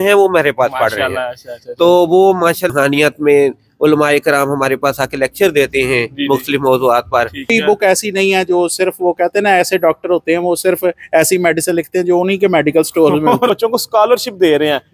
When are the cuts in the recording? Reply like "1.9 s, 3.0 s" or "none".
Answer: 2.7 s, 7.5 s, 13.5 s